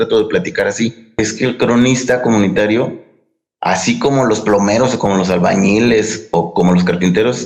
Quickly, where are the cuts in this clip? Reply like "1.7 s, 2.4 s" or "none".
1.1 s

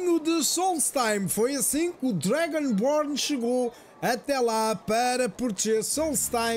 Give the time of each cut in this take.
none

